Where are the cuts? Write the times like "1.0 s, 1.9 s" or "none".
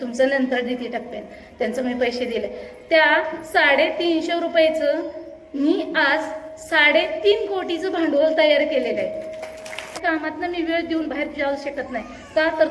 10.0 s

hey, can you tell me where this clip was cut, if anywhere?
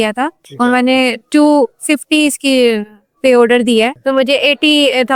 none

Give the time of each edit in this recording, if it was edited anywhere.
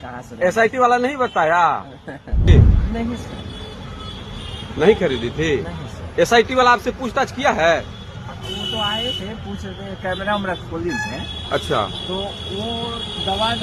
2.5 s

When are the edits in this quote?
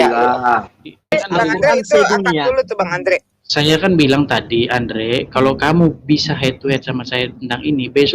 1.1 s

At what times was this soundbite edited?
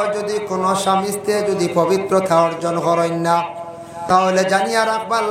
4.0 s

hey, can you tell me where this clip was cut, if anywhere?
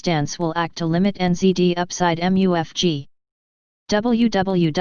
2.7 s

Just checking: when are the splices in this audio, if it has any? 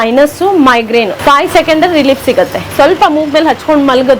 1.1 s, 2.7 s

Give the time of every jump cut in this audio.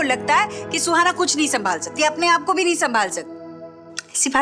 none

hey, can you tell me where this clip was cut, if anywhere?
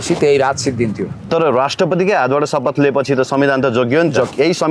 none

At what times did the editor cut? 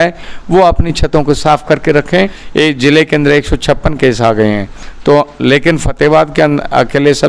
2.4 s

